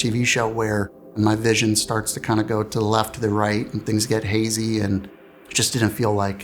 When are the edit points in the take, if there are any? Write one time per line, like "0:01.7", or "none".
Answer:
0:01.1

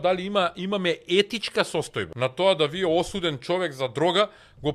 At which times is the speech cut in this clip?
0:02.0

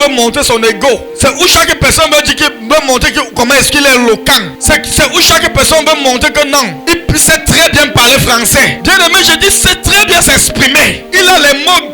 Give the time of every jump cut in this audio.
0:01.1
0:04.5
0:06.8
0:08.8
0:11.0

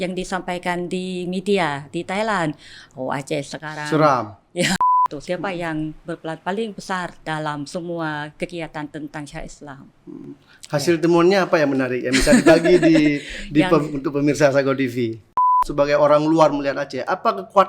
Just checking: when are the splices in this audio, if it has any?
0:04.8
0:07.2
0:15.6

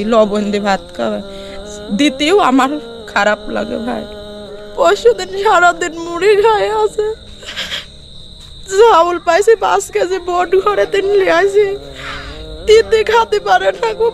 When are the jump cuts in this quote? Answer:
0:04.6

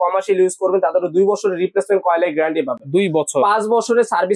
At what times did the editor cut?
none

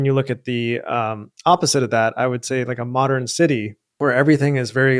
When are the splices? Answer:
0:03.8

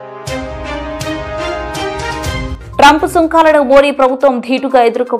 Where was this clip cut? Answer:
0:02.5

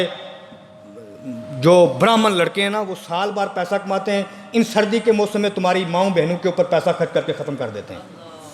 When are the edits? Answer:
none

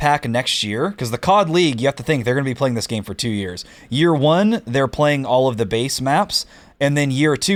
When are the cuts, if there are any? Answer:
none

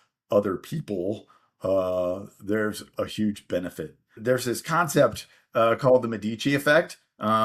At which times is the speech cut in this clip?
0:04.1

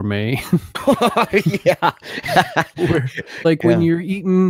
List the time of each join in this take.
0:03.4

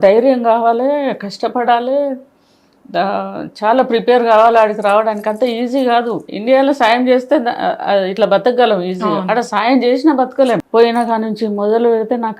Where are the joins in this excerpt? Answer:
0:06.3
0:10.6

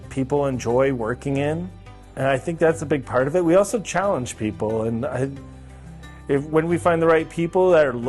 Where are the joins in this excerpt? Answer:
none

